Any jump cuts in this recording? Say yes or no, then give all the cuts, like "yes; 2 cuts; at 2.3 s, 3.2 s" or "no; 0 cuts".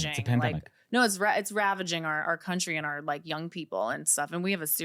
no; 0 cuts